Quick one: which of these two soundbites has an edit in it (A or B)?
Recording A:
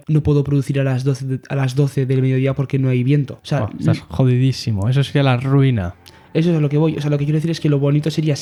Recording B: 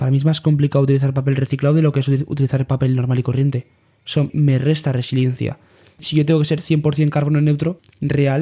B